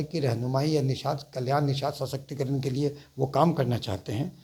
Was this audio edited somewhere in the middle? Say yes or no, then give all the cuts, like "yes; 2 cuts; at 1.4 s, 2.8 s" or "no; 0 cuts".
no; 0 cuts